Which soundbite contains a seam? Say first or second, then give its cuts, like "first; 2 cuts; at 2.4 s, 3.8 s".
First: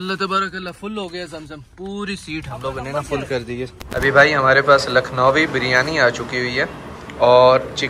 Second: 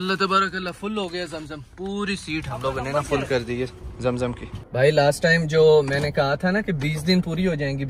first; 1 cut; at 3.8 s